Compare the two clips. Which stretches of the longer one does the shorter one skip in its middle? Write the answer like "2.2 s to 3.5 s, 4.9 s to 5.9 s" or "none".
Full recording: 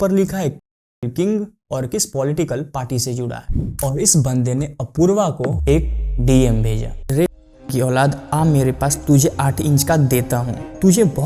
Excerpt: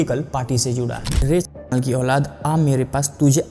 3.4 s to 6.9 s